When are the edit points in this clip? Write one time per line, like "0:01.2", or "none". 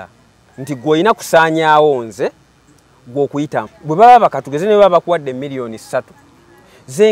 0:03.7